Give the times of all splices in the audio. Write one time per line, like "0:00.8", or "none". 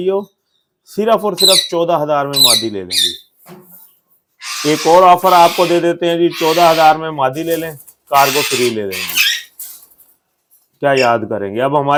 none